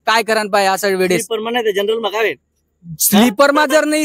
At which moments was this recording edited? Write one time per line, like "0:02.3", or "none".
none